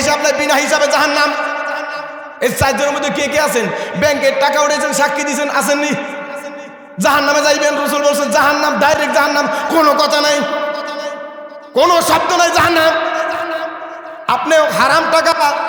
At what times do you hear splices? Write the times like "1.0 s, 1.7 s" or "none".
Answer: none